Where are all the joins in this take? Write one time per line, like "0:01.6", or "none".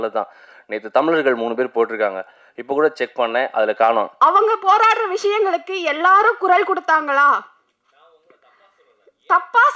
0:04.1